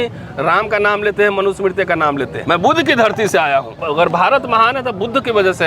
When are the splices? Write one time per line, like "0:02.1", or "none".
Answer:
0:02.3
0:03.8